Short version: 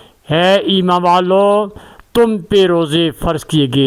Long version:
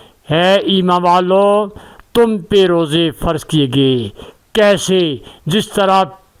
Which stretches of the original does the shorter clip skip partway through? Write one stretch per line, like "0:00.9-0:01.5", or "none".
none